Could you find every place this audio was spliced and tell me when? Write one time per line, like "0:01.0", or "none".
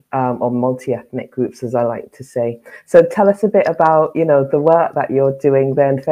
none